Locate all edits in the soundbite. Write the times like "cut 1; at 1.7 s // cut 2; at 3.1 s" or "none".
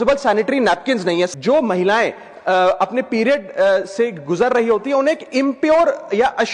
cut 1; at 1.3 s